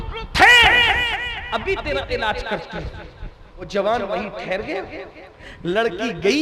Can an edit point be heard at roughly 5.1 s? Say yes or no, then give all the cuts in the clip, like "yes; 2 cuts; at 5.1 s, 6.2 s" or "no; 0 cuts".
no; 1 cut; at 3.7 s